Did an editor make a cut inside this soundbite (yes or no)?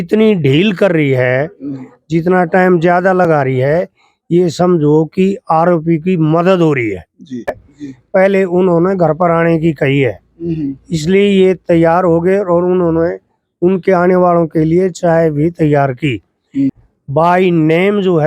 yes